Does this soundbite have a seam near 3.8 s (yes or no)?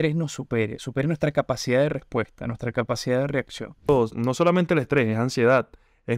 yes